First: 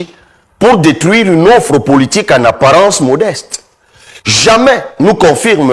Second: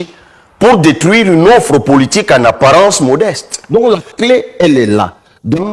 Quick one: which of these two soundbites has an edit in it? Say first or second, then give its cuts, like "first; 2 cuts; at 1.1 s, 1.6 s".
second; 1 cut; at 3.5 s